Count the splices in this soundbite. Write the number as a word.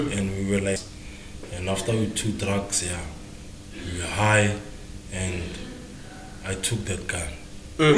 one